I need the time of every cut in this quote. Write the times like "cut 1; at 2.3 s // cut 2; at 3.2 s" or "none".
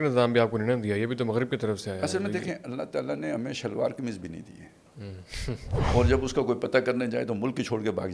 cut 1; at 5.7 s